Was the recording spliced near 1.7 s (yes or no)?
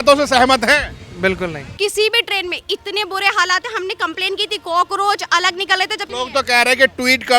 yes